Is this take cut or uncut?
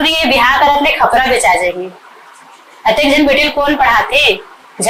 uncut